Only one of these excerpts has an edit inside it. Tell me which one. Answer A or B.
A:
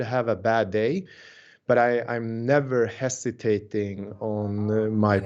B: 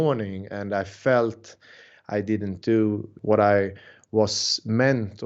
B